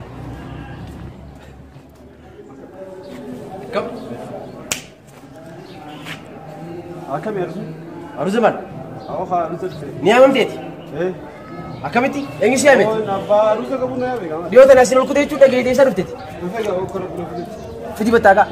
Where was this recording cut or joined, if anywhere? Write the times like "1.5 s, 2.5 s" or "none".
1.9 s